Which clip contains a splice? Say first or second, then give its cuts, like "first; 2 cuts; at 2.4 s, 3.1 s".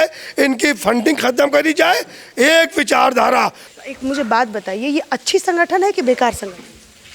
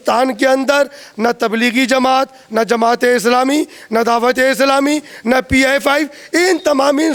first; 1 cut; at 3.7 s